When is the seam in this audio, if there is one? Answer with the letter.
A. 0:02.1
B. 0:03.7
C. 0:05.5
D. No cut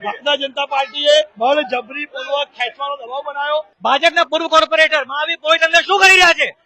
B